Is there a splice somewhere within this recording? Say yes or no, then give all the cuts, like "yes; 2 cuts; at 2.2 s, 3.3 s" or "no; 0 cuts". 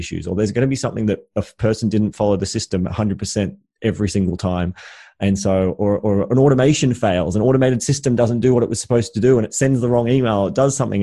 no; 0 cuts